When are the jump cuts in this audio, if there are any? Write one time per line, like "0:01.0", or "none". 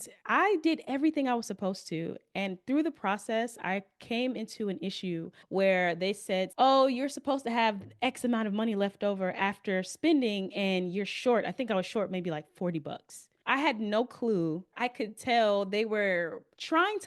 0:06.5
0:14.7